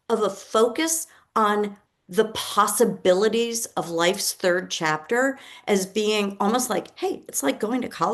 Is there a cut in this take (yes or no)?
no